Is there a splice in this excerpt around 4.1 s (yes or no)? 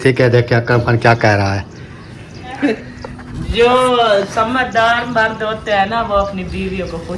no